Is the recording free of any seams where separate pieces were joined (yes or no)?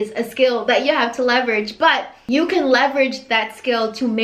no